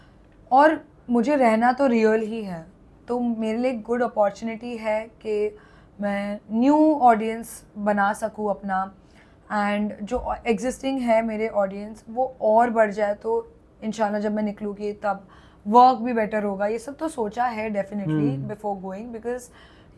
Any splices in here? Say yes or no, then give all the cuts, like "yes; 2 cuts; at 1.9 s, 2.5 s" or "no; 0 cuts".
no; 0 cuts